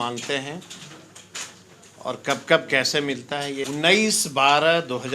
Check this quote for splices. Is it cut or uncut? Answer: cut